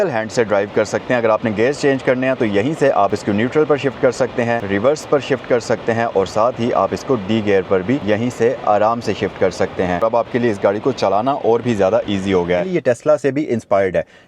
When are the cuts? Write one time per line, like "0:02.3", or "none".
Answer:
0:03.1
0:04.6
0:08.0
0:10.0
0:12.7